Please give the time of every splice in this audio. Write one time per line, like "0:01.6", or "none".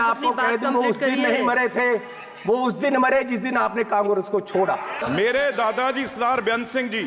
0:05.0